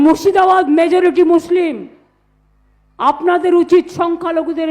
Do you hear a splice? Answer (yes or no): no